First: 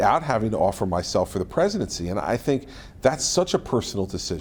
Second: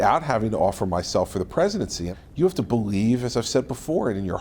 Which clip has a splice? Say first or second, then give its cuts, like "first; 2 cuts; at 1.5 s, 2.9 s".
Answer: second; 1 cut; at 2.0 s